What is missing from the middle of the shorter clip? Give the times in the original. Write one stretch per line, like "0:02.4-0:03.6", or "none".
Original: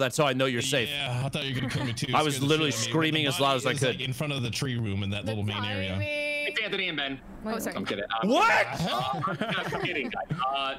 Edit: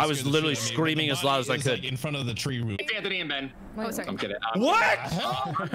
0:04.9-0:06.4